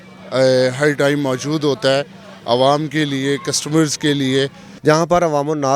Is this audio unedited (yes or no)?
no